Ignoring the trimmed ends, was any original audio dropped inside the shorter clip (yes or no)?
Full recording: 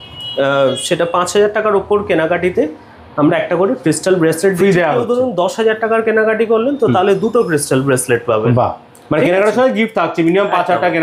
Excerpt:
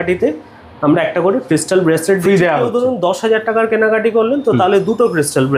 no